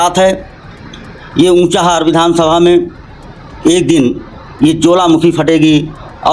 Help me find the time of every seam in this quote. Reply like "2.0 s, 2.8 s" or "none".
none